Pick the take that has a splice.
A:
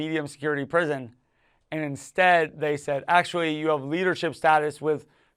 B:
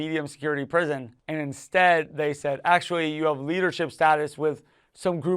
B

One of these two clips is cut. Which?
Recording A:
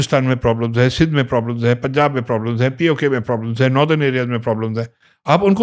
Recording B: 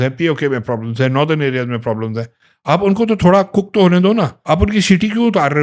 B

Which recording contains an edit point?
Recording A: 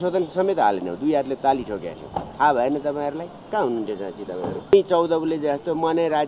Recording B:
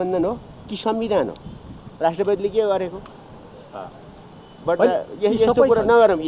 A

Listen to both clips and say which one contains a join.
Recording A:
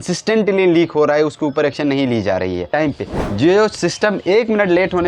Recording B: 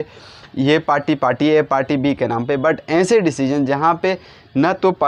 A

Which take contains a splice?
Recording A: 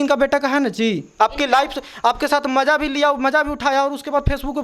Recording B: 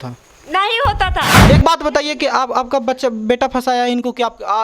B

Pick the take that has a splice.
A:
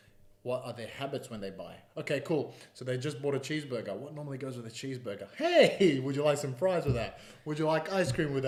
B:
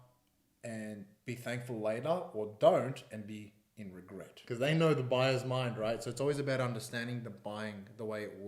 B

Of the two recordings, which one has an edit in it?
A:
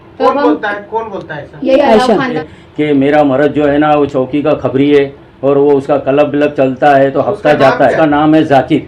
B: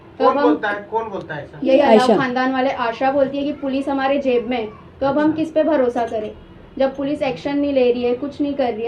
A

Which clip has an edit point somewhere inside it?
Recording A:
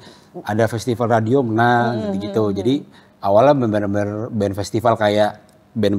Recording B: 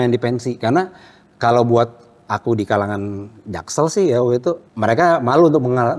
B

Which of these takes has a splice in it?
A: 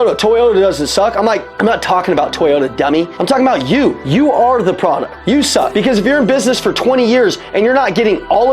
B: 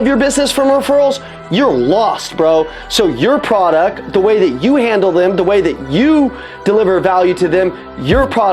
A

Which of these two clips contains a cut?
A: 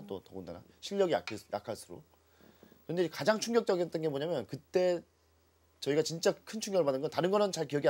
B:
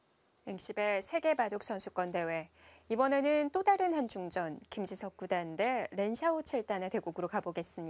A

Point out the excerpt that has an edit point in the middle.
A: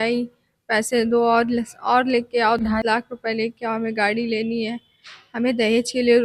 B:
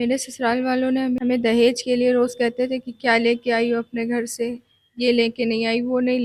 B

